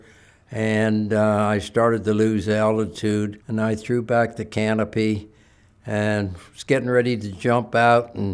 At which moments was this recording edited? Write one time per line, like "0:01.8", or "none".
0:03.4